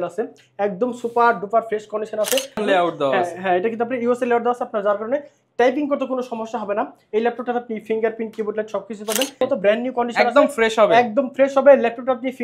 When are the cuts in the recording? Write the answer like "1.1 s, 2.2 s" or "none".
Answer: 2.6 s, 9.4 s